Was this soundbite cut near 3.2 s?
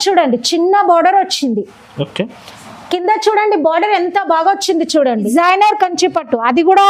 no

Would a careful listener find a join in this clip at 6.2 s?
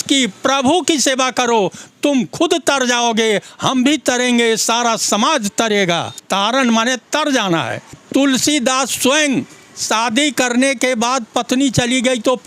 yes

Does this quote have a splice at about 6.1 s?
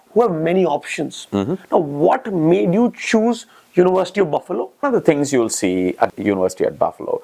yes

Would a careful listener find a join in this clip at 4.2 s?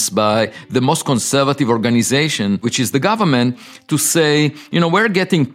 no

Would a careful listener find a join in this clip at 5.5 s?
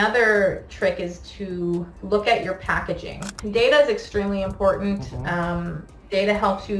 no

